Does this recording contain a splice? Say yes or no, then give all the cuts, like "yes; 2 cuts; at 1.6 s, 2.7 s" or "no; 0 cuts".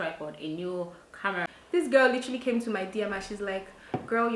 yes; 1 cut; at 1.5 s